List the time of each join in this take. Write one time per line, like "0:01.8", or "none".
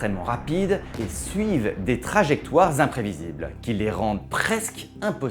0:01.0